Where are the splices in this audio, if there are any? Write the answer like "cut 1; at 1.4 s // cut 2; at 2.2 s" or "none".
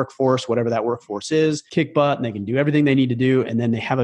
cut 1; at 1.6 s